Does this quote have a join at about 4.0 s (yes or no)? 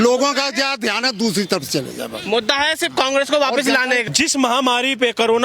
yes